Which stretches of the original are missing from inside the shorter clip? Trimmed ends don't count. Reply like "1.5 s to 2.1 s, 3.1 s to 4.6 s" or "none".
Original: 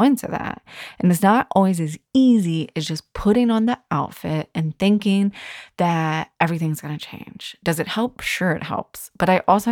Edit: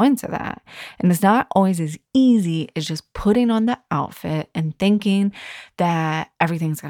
none